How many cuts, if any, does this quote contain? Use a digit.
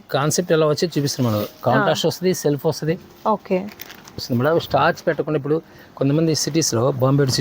1